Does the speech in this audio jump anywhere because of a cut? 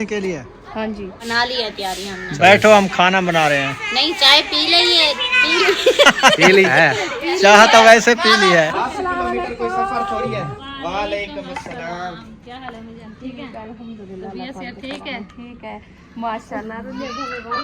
yes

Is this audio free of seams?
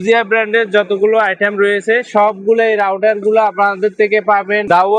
yes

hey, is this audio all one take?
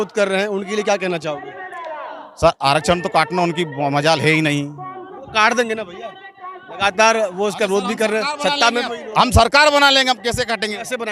yes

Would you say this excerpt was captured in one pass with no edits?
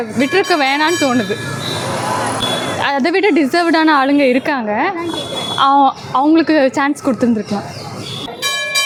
yes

